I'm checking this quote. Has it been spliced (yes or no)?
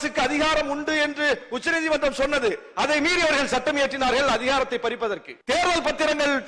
yes